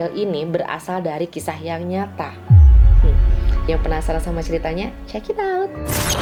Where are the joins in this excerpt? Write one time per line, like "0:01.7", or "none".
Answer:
none